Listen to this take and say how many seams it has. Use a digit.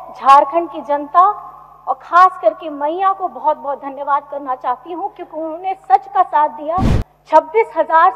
1